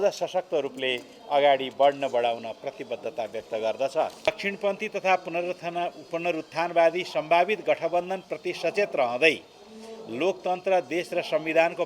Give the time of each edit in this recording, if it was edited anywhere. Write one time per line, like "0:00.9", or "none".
0:04.3